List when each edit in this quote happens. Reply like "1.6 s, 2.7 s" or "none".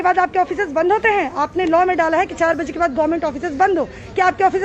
none